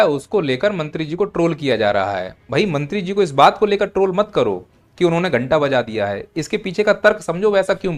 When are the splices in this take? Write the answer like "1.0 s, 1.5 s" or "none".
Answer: none